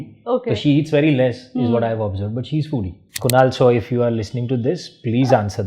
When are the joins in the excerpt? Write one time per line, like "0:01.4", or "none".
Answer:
0:03.1